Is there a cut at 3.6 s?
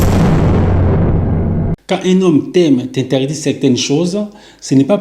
no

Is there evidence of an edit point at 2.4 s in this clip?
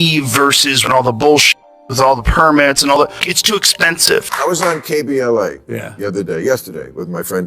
no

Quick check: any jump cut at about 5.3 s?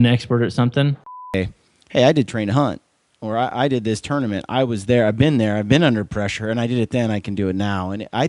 no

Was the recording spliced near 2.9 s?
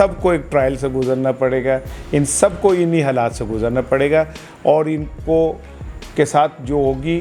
no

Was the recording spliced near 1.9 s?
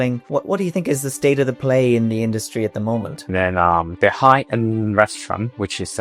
no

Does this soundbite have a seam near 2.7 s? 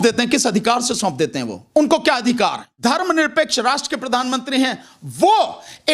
yes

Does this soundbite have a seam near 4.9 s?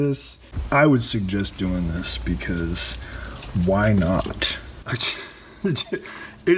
yes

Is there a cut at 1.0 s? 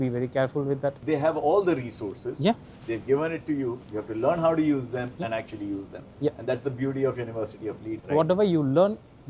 yes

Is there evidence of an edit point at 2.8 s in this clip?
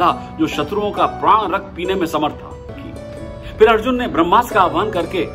yes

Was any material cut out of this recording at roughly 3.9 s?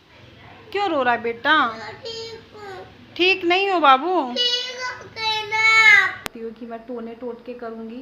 no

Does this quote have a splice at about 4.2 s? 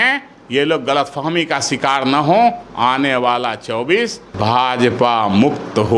yes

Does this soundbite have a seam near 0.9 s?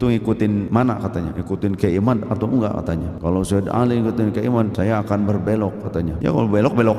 yes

